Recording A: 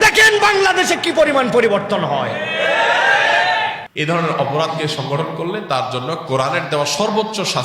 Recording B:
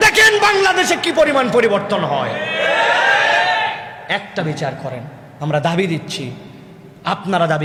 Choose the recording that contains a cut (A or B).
A